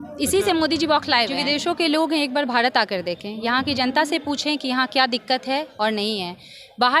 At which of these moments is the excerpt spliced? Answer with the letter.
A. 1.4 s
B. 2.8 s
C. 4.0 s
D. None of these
A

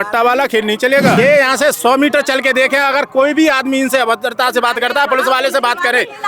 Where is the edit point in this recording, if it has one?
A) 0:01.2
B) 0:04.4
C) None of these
A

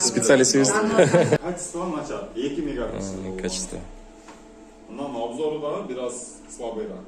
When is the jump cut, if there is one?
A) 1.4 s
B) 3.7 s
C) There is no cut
A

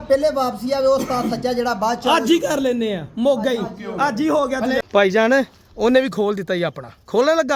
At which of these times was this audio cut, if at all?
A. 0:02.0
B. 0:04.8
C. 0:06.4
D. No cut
B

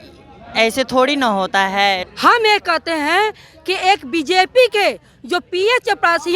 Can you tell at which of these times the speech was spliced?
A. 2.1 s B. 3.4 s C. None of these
A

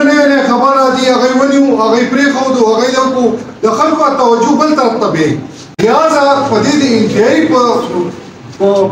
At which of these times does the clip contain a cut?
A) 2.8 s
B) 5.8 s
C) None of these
B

